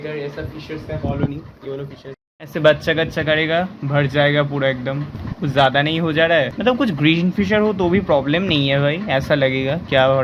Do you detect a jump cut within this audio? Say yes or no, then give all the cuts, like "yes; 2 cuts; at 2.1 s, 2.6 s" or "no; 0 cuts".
no; 0 cuts